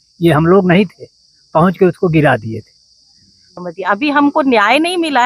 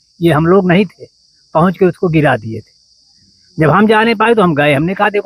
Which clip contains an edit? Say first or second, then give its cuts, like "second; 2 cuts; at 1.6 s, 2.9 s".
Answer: first; 1 cut; at 3.5 s